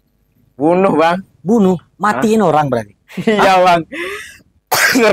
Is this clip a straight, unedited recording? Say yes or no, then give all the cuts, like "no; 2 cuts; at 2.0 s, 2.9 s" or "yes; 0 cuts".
yes; 0 cuts